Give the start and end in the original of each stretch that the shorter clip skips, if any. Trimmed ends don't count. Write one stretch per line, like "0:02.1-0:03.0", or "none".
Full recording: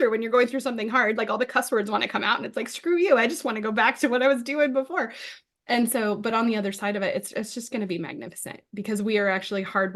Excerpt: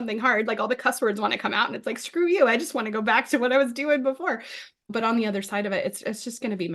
0:05.6-0:06.2